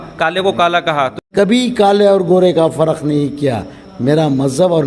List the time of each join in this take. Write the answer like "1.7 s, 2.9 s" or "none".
1.2 s